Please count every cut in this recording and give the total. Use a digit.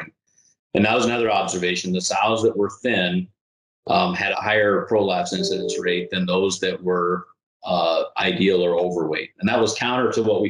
1